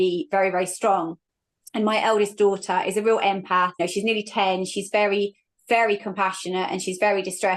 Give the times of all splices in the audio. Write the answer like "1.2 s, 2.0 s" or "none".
none